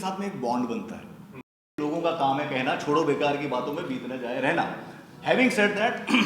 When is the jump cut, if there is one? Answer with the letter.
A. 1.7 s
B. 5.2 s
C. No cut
A